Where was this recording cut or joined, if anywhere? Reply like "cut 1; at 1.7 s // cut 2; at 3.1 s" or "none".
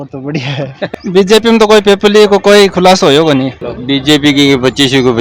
cut 1; at 0.9 s // cut 2; at 3.6 s